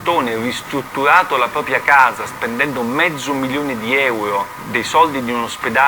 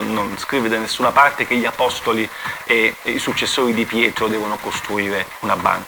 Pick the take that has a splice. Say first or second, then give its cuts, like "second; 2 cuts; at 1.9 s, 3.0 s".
first; 1 cut; at 4.6 s